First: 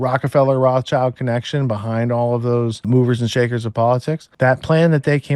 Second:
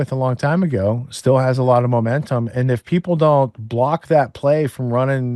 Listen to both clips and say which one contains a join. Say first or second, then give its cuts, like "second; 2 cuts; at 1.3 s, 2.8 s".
first; 2 cuts; at 2.9 s, 4.3 s